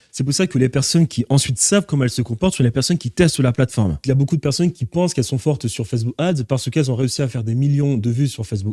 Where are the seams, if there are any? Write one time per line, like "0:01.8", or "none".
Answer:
0:04.0